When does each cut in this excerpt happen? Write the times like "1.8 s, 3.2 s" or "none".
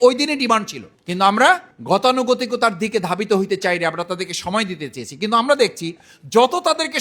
none